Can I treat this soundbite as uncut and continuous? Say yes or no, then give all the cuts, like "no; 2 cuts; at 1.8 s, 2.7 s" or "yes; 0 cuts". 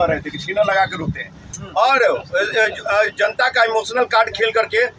yes; 0 cuts